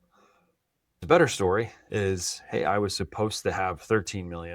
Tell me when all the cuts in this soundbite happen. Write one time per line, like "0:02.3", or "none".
0:01.0